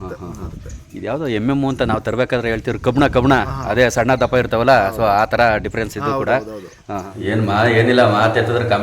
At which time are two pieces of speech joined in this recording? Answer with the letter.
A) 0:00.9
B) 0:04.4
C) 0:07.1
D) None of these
C